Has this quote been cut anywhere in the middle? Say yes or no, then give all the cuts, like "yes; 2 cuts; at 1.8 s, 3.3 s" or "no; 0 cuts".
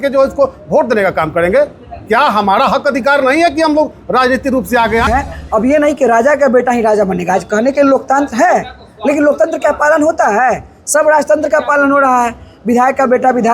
yes; 1 cut; at 5.1 s